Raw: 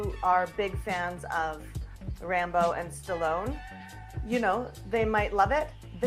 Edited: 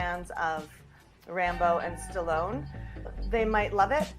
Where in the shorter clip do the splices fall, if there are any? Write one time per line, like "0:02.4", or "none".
0:03.2